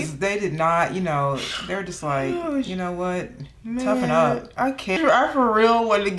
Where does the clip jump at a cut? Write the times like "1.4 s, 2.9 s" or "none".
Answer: 5.0 s